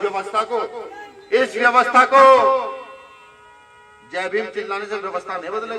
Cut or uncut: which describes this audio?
uncut